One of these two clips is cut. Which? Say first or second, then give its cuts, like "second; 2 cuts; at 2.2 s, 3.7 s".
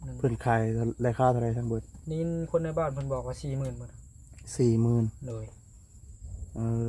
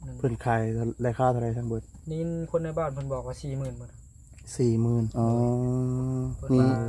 second; 1 cut; at 5.1 s